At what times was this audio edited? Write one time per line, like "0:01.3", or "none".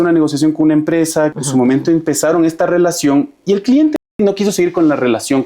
0:01.4
0:04.1